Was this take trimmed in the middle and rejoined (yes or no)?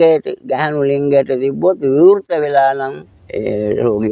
no